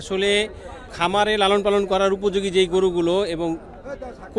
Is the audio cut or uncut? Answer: cut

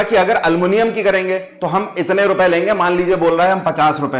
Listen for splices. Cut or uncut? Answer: uncut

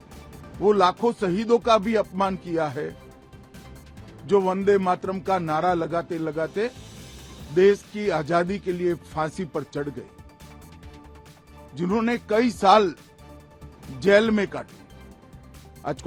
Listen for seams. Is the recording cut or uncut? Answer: uncut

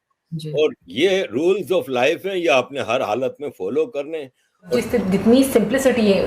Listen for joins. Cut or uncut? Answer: cut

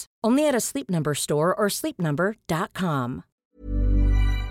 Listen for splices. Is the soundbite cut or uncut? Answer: cut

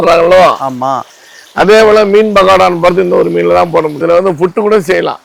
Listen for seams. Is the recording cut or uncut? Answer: cut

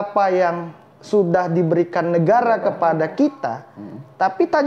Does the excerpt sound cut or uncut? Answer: uncut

